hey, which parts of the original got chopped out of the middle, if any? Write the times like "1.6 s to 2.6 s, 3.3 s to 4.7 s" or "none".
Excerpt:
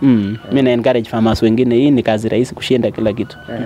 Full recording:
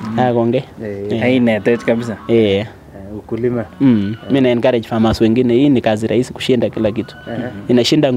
none

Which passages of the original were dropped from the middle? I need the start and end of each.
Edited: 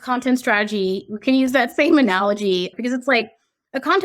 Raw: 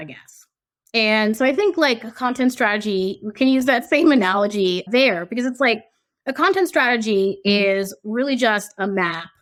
4.8 s to 5.2 s

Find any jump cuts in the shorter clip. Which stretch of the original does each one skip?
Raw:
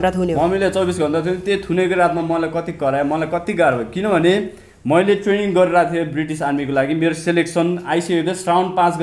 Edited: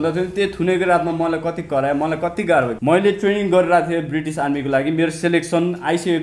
3.8 s to 4.8 s

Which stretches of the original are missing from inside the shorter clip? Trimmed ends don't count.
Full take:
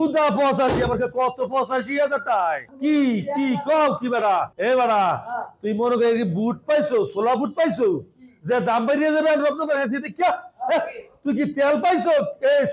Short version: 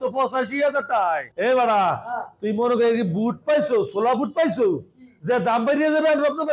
2.7 s to 4.5 s

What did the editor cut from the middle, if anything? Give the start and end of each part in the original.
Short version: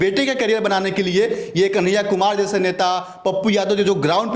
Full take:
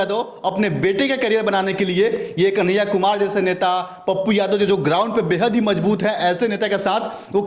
none

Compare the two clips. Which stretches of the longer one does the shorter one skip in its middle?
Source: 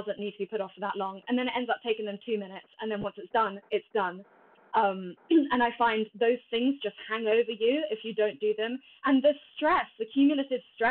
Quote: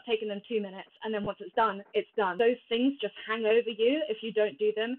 4.1 s to 6.1 s

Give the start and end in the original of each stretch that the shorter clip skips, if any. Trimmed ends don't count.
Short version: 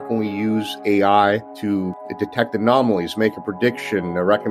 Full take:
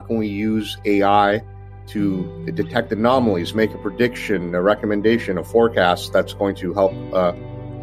1.9 s to 2.2 s

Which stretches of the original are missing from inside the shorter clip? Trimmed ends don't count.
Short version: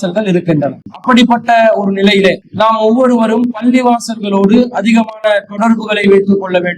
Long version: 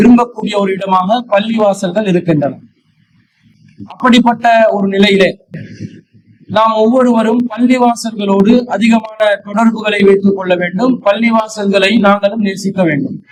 2.7 s to 3.8 s, 5.4 s to 6.4 s

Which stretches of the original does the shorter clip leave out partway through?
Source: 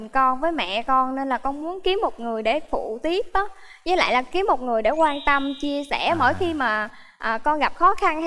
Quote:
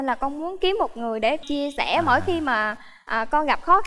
2.7 s to 5.6 s

